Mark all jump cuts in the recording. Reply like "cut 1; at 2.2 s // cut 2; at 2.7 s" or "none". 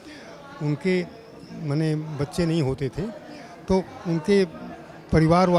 none